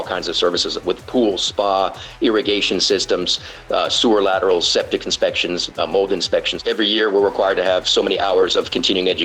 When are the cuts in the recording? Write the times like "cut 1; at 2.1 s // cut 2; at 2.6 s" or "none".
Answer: cut 1; at 1.0 s // cut 2; at 6.6 s